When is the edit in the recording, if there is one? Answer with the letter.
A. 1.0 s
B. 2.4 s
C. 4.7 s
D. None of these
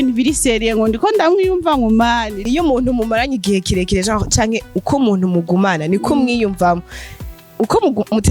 B